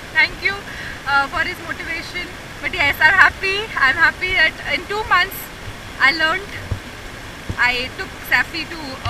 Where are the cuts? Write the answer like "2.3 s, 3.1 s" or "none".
2.5 s